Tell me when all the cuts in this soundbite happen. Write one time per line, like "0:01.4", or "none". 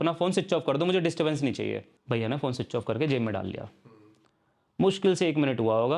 0:01.9